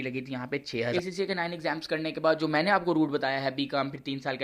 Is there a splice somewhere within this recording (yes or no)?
yes